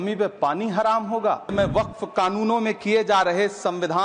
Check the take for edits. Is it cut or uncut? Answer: cut